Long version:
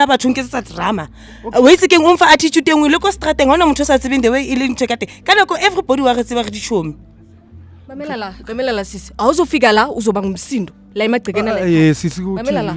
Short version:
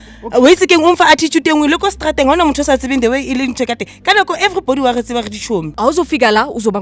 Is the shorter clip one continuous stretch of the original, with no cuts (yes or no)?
no